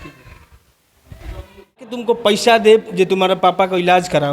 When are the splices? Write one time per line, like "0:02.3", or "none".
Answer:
0:01.9